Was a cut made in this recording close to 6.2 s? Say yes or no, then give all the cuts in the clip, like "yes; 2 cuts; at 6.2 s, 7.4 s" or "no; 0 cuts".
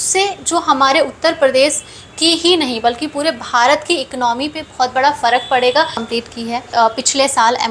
yes; 1 cut; at 6.2 s